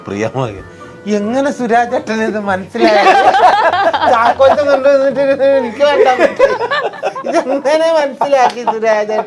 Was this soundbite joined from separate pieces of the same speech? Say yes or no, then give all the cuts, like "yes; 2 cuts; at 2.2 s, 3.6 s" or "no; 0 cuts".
no; 0 cuts